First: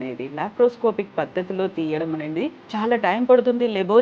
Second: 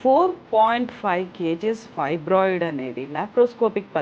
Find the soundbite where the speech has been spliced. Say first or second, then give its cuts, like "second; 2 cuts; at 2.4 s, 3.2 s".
first; 1 cut; at 2.6 s